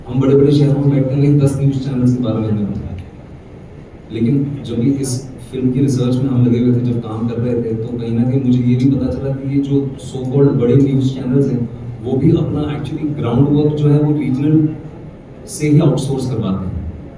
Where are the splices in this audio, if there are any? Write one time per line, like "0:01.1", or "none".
none